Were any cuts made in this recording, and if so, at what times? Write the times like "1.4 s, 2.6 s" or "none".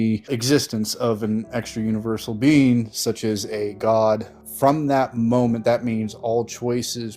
4.4 s